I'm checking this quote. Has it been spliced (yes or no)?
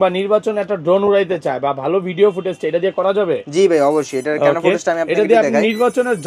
no